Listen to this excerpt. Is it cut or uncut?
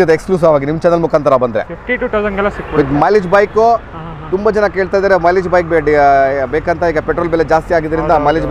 uncut